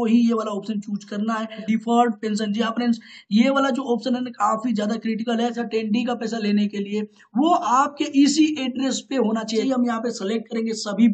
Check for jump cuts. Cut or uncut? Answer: cut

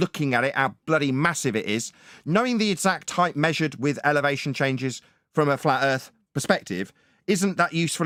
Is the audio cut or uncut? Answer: uncut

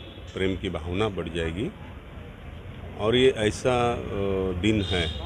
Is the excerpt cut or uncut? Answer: uncut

